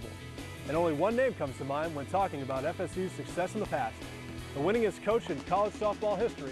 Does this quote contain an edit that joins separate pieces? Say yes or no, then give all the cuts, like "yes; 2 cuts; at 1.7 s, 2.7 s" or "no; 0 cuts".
no; 0 cuts